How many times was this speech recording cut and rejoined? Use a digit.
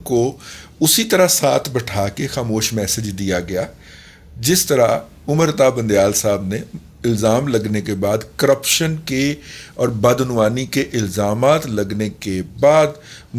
0